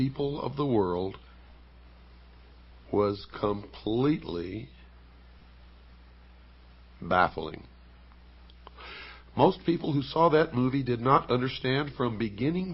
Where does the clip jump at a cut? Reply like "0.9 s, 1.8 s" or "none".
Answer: 1.0 s